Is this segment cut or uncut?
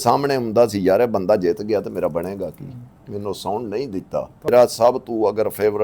cut